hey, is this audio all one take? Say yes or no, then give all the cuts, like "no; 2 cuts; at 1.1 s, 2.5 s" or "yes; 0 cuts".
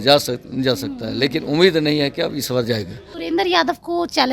no; 1 cut; at 3.0 s